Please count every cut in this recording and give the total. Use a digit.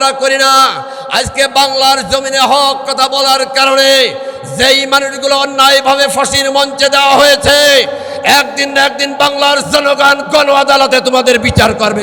0